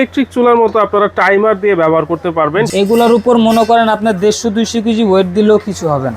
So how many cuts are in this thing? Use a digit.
1